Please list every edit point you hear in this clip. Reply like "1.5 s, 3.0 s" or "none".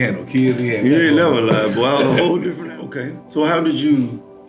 2.5 s